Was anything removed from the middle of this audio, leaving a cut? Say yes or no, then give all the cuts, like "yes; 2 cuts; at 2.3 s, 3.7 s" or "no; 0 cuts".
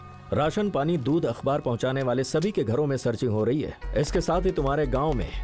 no; 0 cuts